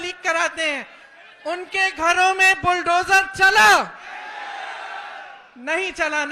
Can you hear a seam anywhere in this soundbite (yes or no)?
no